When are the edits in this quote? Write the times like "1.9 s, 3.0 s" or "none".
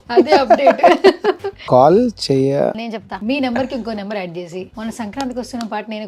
1.5 s, 2.8 s, 4.7 s